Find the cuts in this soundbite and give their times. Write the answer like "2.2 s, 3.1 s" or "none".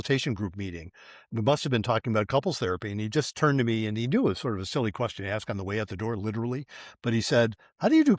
none